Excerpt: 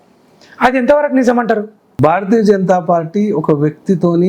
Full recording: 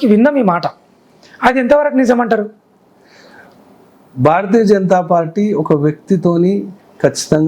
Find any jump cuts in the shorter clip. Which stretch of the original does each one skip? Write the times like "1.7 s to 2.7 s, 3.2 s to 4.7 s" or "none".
2.6 s to 4.0 s